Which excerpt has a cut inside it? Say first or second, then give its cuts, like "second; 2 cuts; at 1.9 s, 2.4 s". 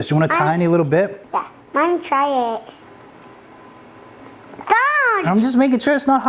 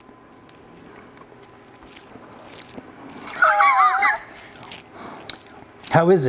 first; 2 cuts; at 1.2 s, 2.8 s